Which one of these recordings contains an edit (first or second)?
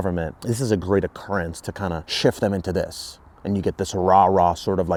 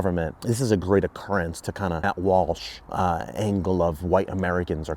second